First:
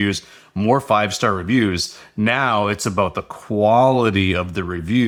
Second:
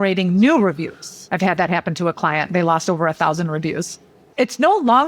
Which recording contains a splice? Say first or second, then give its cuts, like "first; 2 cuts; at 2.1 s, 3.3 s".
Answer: second; 2 cuts; at 1.1 s, 4.2 s